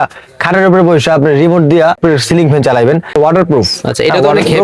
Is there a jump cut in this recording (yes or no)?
yes